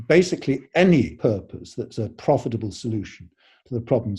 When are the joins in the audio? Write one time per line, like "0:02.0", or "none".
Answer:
0:01.2